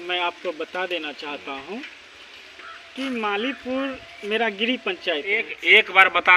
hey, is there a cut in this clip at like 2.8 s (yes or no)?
no